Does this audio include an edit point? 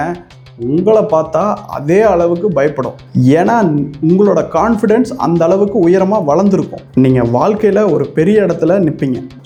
no; 0 cuts

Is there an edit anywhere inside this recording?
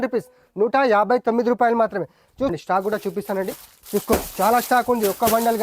yes; 1 cut; at 2.5 s

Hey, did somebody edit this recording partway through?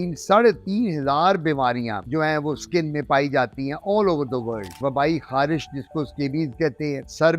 yes; 1 cut; at 4.8 s

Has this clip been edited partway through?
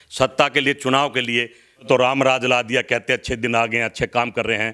yes; 1 cut; at 1.9 s

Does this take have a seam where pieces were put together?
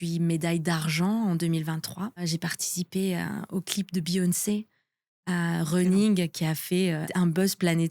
yes; 2 cuts; at 2.2 s, 7.1 s

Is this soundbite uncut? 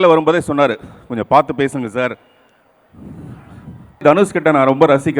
no; 1 cut; at 4.0 s

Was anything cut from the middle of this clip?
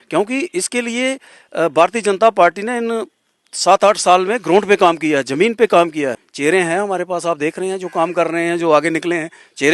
yes; 1 cut; at 6.3 s

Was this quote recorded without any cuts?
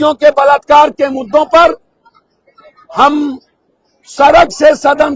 yes; 0 cuts

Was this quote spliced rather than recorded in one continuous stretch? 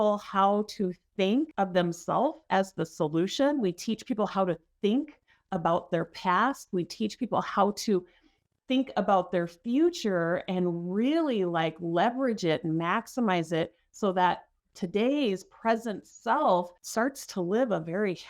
yes; 2 cuts; at 1.5 s, 16.8 s

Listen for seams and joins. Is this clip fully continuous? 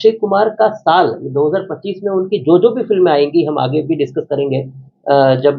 yes; 0 cuts

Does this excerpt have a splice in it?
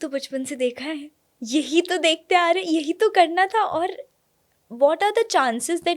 no; 0 cuts

